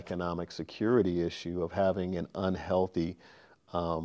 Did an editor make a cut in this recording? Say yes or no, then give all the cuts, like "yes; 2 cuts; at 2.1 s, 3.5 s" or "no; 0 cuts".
no; 0 cuts